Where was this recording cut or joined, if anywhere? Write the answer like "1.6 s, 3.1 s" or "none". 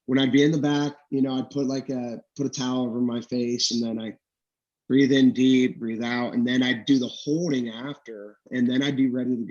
8.5 s